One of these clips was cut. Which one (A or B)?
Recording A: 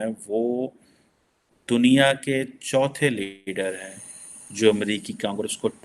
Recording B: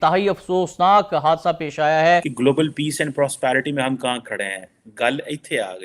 B